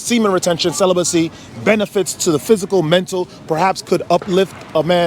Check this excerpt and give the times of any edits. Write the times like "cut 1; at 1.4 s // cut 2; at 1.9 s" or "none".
none